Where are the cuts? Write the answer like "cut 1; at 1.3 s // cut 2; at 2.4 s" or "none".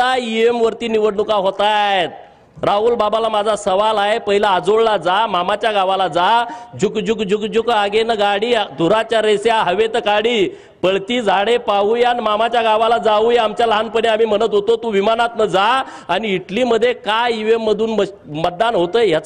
none